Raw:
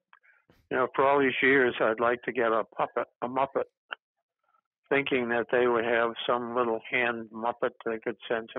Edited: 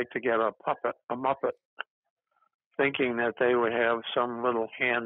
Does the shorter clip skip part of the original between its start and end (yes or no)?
no